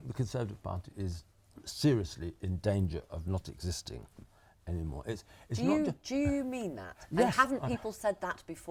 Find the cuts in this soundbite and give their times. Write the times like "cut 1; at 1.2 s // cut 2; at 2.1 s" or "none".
none